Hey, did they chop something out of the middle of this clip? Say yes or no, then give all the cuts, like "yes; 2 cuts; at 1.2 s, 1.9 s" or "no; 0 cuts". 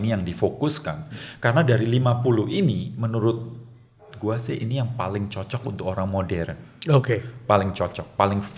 no; 0 cuts